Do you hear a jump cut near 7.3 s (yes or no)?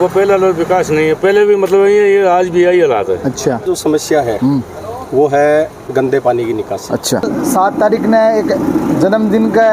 yes